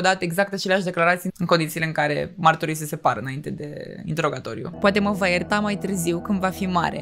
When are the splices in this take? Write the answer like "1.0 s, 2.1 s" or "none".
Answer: 1.3 s, 4.7 s